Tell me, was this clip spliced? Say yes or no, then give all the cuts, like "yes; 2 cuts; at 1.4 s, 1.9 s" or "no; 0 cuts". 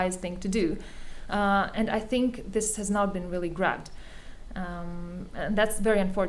no; 0 cuts